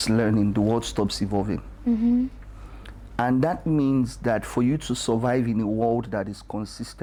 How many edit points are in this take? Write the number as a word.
zero